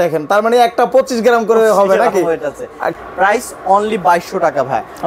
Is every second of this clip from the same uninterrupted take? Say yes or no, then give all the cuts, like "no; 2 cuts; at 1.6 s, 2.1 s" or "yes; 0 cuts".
no; 1 cut; at 2.9 s